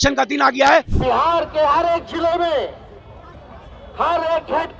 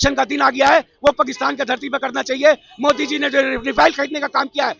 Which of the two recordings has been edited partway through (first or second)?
first